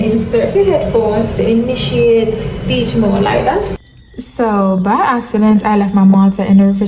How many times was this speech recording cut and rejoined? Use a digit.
1